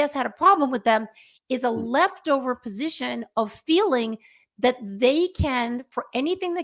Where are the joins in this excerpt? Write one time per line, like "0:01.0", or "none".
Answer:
none